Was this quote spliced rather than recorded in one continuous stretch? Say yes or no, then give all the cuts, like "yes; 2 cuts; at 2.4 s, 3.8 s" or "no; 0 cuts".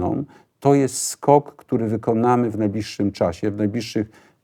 no; 0 cuts